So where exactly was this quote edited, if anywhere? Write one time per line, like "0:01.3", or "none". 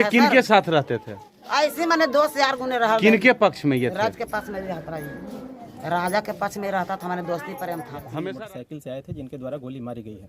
0:08.1